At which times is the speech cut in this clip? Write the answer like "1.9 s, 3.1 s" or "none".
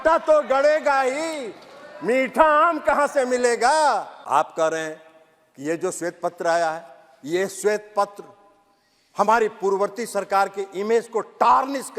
none